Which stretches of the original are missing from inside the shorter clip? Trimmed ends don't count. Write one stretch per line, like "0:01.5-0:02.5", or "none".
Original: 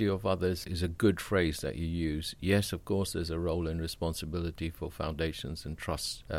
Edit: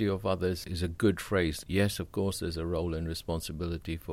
0:01.6-0:02.3